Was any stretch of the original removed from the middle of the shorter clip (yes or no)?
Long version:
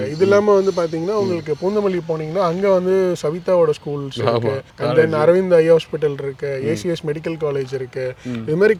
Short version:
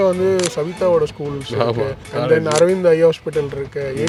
no